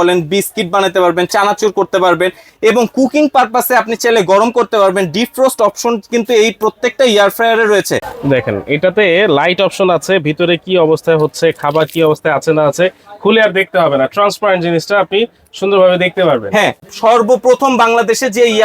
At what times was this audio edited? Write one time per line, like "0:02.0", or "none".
0:08.0
0:16.8